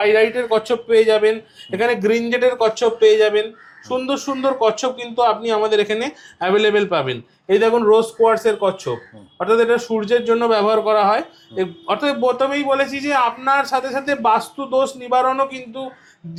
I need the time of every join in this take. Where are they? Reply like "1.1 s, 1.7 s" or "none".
none